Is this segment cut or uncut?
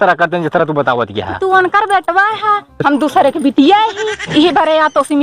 uncut